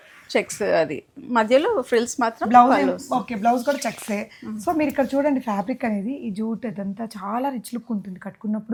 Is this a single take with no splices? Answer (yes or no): yes